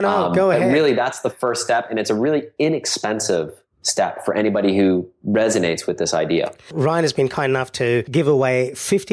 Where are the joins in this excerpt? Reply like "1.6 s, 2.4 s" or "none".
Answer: 8.1 s